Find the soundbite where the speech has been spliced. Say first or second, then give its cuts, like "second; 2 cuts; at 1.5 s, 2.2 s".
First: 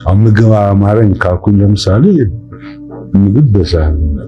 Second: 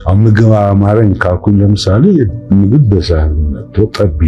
second; 1 cut; at 2.4 s